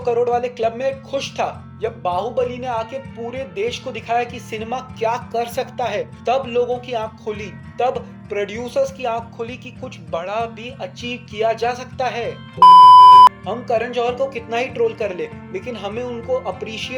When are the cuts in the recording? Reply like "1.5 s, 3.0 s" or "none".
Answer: 6.1 s, 12.6 s